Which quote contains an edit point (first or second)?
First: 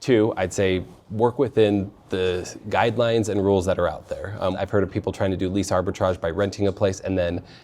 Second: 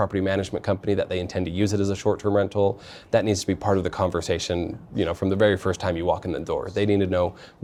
first